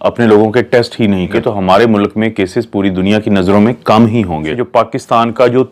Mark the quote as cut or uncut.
cut